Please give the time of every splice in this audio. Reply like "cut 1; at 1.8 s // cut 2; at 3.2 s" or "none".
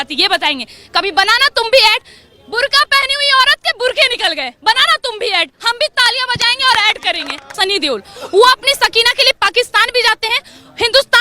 cut 1; at 7.5 s